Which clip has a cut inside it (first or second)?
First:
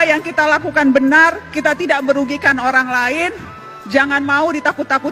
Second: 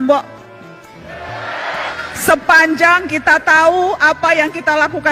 second